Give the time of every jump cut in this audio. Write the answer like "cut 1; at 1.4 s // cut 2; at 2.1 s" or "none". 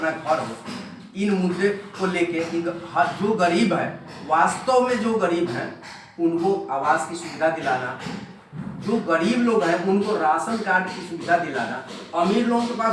none